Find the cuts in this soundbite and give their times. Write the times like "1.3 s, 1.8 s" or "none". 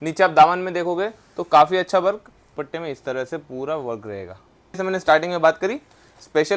2.5 s, 4.8 s